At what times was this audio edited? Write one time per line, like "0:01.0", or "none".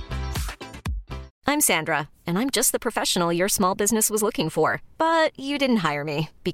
0:01.3